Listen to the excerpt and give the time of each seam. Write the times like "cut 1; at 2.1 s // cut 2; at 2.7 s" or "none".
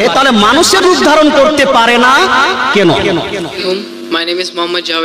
none